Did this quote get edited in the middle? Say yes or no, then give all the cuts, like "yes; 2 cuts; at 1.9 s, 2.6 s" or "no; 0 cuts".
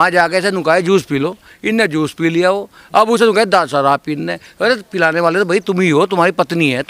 no; 0 cuts